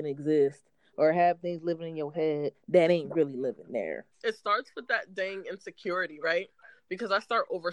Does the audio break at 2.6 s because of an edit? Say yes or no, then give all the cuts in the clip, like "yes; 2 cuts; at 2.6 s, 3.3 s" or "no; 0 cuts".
no; 1 cut; at 4.0 s